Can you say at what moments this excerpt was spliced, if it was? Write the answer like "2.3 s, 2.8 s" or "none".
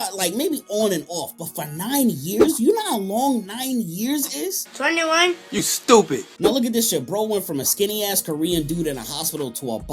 6.3 s